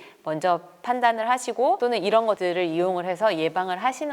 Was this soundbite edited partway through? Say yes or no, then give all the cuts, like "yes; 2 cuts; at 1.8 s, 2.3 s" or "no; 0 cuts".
yes; 1 cut; at 2.1 s